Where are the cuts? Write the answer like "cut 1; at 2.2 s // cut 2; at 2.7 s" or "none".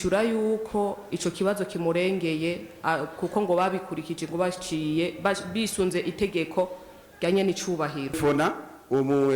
cut 1; at 8.2 s